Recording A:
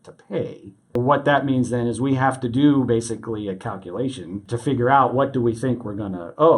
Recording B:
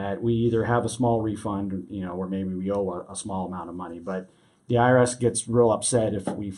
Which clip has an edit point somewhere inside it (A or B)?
A